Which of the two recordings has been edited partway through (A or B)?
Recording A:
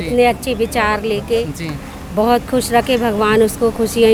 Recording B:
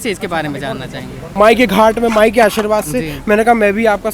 B